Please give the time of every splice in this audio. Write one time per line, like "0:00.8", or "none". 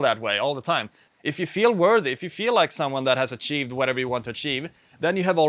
0:01.0